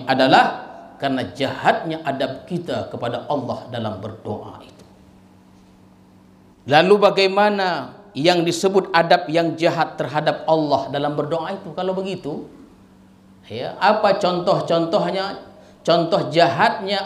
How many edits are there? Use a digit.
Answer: 1